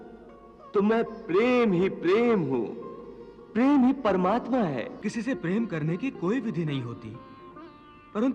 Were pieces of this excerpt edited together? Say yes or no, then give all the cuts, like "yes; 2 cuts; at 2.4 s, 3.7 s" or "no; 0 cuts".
yes; 1 cut; at 5.0 s